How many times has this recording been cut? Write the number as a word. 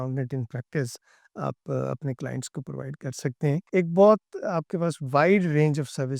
one